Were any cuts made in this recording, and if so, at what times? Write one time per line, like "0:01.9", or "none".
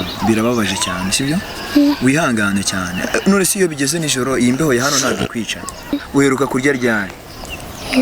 0:06.0